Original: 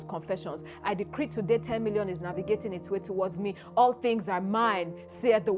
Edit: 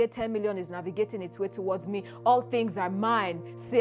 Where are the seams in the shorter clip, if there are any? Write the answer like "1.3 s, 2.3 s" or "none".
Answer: none